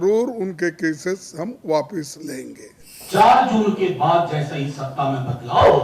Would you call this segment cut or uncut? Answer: cut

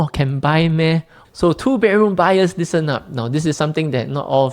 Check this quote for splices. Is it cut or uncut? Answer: cut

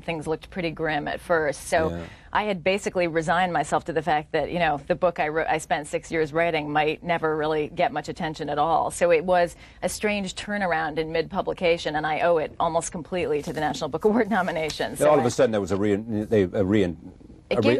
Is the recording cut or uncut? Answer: cut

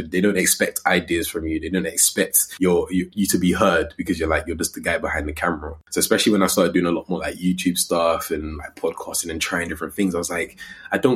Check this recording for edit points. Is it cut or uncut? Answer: cut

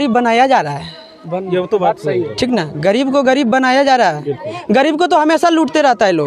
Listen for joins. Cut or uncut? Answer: uncut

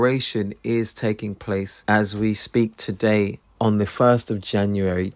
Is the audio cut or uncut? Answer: uncut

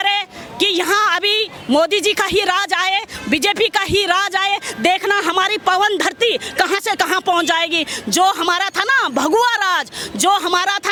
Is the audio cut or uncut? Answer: uncut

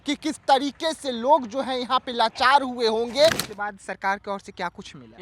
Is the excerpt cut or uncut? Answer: cut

